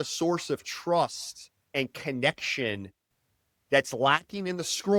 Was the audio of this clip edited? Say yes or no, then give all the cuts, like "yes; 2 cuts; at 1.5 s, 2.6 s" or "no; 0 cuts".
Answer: no; 0 cuts